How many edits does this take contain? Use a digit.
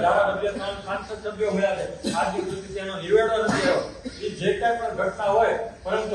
0